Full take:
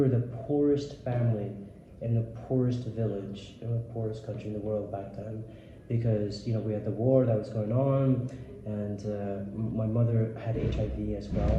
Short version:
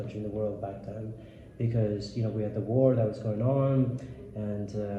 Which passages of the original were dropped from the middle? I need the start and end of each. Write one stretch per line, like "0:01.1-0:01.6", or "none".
none